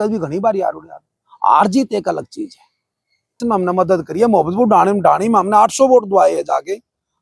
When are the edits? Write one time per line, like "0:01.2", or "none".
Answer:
0:03.4